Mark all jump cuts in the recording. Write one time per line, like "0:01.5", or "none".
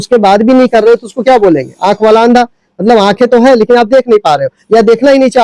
none